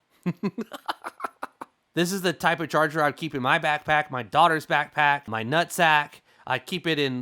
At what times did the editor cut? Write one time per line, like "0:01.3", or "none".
0:01.9